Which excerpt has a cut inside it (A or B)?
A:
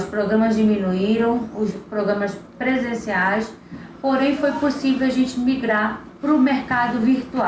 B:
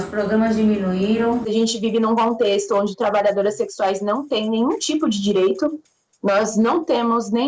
B